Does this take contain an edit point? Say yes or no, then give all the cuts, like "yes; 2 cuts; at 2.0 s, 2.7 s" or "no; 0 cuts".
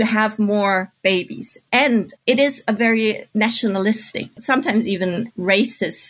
yes; 3 cuts; at 2.1 s, 3.2 s, 4.4 s